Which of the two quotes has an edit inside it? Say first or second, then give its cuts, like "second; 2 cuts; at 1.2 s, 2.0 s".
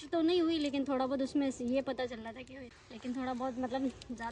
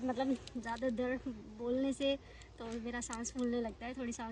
first; 1 cut; at 2.6 s